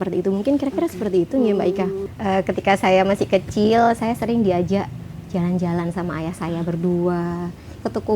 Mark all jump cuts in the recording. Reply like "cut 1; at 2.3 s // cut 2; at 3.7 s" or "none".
cut 1; at 2.0 s